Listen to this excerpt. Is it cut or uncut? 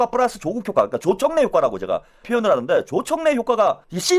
uncut